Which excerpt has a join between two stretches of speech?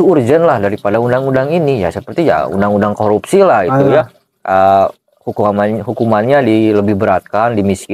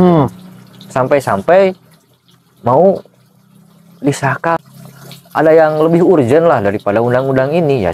second; 1 cut; at 4.6 s

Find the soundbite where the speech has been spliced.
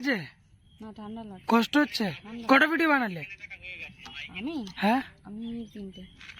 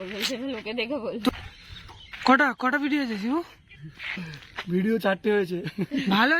second; 1 cut; at 1.3 s

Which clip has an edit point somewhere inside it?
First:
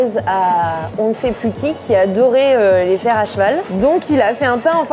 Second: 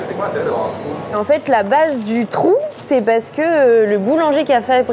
second; 1 cut; at 1.1 s

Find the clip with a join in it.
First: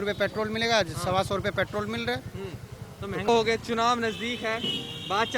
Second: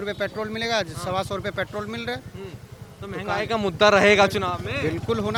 first; 1 cut; at 3.3 s

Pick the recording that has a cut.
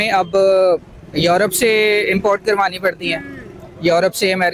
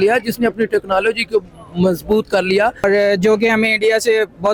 second; 1 cut; at 2.8 s

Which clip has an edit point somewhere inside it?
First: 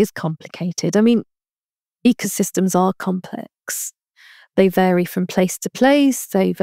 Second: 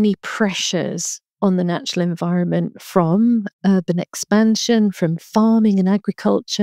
second; 1 cut; at 3.5 s

